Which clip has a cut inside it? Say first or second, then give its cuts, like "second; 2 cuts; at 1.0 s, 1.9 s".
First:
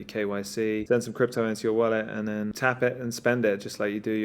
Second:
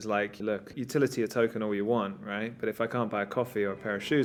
first; 2 cuts; at 0.8 s, 2.5 s